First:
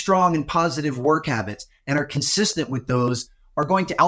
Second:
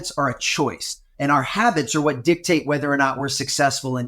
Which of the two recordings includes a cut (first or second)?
second